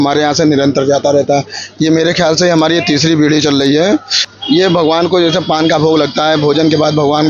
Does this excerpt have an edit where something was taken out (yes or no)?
yes